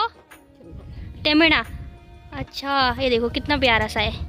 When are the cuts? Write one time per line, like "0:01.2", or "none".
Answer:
none